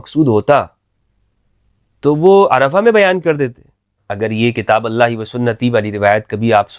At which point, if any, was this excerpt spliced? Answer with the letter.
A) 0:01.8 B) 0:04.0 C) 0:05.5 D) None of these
B